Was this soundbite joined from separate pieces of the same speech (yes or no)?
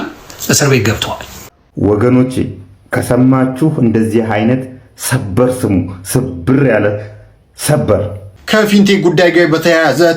yes